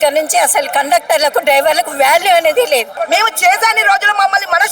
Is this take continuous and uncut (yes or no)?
no